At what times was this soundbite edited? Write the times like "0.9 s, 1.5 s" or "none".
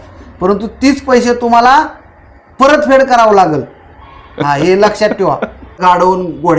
5.7 s